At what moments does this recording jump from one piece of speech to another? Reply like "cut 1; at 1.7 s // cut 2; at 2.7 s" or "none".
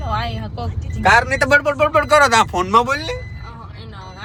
none